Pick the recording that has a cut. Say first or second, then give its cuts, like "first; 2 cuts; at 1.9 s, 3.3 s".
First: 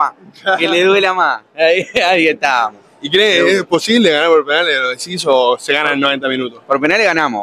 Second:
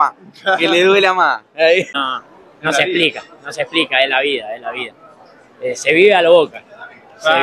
second; 1 cut; at 1.9 s